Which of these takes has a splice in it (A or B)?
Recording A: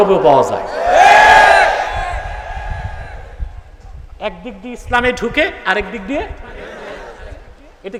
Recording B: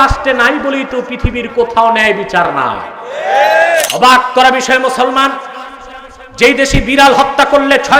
B